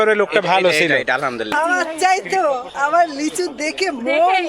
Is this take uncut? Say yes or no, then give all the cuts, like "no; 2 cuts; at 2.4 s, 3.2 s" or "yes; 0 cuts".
no; 1 cut; at 1.5 s